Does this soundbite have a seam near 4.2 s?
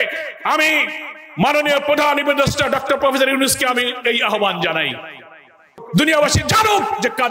no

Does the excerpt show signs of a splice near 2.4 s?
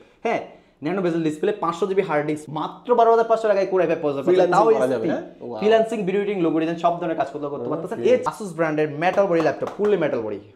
yes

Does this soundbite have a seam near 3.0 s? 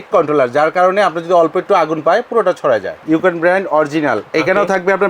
yes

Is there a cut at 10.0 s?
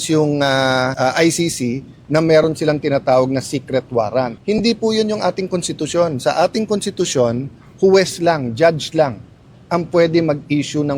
no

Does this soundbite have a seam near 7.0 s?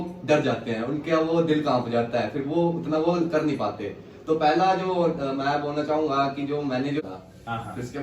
yes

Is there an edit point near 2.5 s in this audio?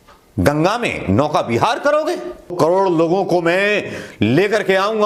yes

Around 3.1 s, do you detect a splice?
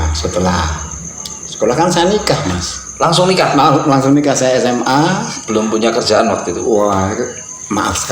no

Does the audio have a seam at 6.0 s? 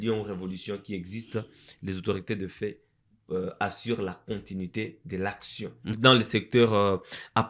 yes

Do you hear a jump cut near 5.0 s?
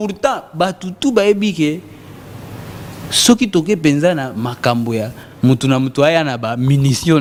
no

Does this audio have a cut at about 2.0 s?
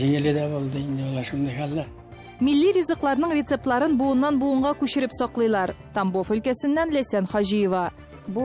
yes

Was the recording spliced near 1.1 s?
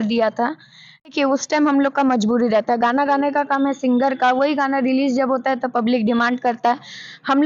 yes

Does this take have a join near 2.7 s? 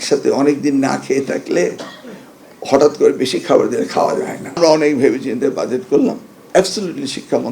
no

